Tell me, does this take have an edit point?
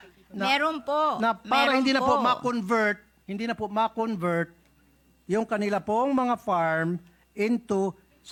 no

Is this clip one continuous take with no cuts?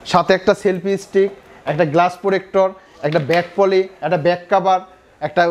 yes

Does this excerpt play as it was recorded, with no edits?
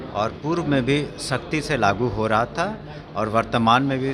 yes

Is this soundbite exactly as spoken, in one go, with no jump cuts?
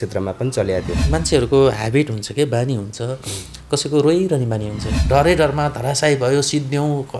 no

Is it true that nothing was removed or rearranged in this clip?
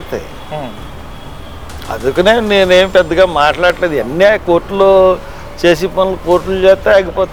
yes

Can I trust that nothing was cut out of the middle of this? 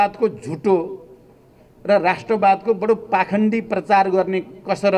yes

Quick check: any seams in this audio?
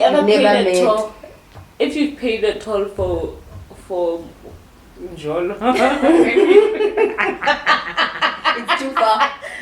no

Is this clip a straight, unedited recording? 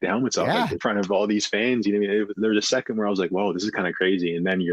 no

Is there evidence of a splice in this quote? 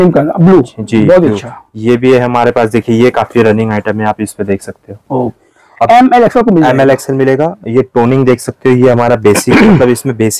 yes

